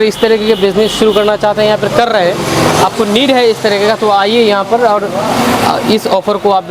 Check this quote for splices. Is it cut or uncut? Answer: uncut